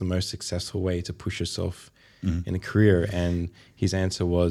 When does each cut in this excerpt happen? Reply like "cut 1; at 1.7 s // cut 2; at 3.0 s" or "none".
none

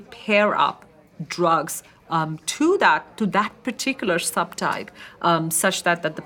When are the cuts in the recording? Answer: none

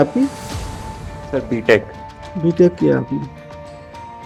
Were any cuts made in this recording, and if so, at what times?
none

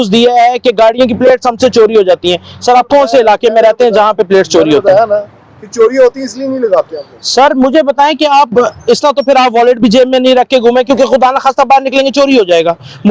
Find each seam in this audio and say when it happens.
none

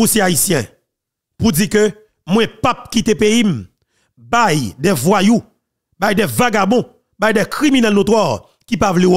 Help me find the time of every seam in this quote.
none

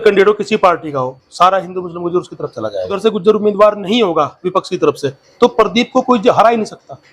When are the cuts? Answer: cut 1; at 3.0 s

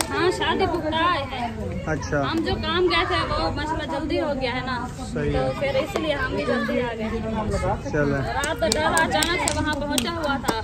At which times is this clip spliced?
none

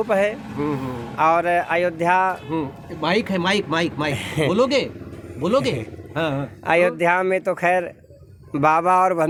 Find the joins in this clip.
none

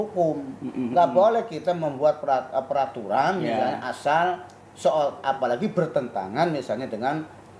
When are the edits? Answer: none

